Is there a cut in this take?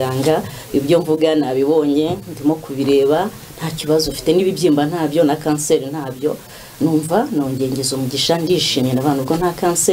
no; 0 cuts

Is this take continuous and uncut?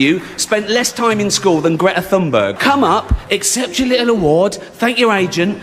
no; 1 cut; at 2.5 s

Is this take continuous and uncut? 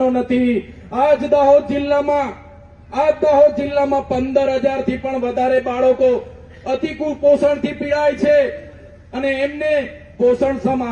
yes; 0 cuts

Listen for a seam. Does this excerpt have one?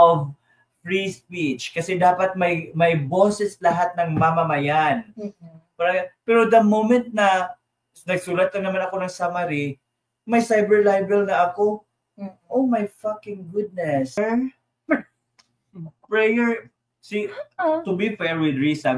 yes; 1 cut; at 14.2 s

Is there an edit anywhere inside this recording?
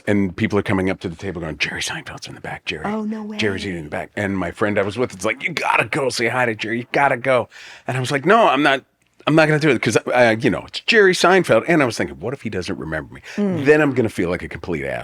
no; 0 cuts

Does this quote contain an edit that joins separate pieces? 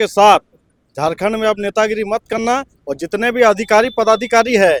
no; 0 cuts

